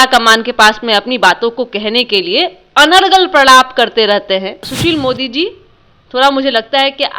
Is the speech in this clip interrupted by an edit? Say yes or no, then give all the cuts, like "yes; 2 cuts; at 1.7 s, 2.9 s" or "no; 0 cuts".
yes; 1 cut; at 4.7 s